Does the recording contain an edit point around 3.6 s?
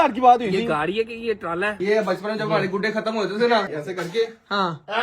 yes; 2 cuts; at 1.8 s, 3.6 s

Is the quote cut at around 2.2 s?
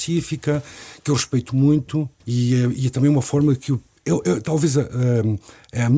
yes; 2 cuts; at 2.2 s, 3.9 s

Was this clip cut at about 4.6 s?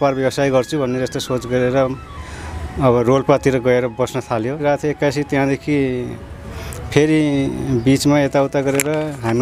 yes; 1 cut; at 4.6 s

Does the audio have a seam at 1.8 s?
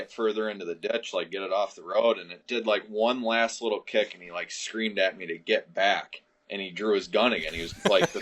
no; 0 cuts

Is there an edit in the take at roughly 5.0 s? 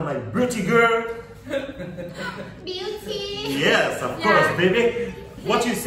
yes; 1 cut; at 5.0 s

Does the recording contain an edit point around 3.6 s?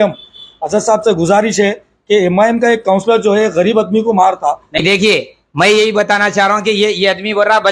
no; 1 cut; at 4.8 s

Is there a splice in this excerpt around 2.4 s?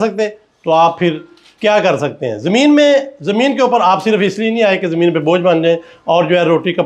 no; 0 cuts

